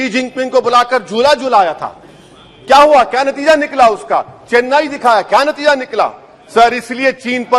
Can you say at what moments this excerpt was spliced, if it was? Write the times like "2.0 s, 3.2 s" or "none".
none